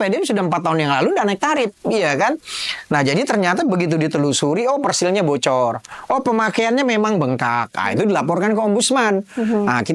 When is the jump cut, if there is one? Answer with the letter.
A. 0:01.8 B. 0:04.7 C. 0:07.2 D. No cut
D